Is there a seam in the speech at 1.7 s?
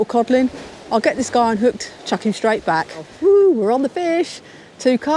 no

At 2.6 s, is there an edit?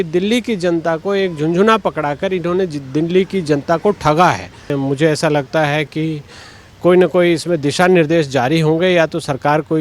no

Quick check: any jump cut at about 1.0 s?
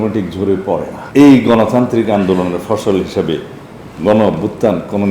yes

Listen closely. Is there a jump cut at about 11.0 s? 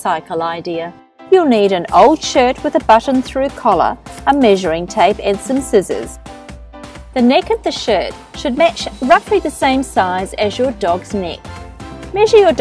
yes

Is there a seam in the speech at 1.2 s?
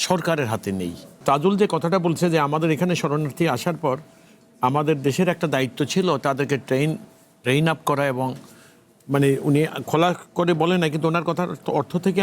yes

